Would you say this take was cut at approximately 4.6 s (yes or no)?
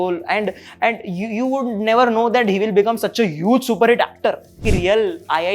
yes